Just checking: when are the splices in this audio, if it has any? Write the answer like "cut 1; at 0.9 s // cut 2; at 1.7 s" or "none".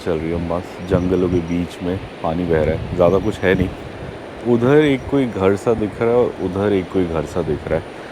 none